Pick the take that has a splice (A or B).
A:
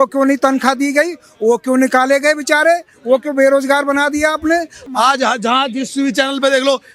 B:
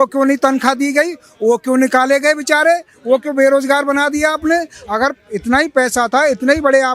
A